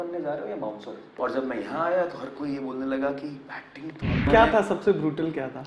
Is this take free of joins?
no; 2 cuts; at 1.1 s, 4.3 s

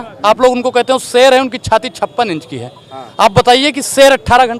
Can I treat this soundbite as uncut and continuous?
yes; 0 cuts

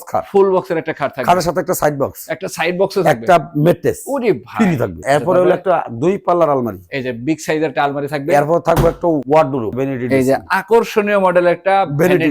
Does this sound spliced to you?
yes; 2 cuts; at 5.0 s, 9.3 s

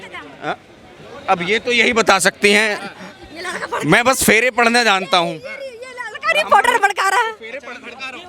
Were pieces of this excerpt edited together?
no; 0 cuts

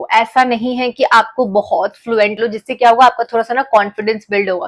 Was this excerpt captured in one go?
no; 1 cut; at 2.4 s

